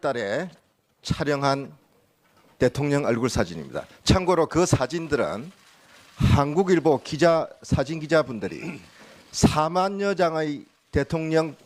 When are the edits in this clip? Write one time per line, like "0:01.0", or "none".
none